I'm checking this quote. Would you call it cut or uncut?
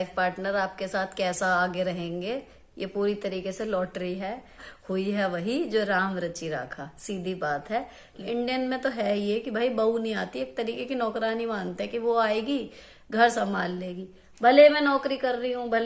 cut